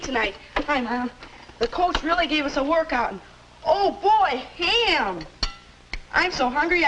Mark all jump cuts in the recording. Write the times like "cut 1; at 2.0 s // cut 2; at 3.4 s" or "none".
cut 1; at 1.4 s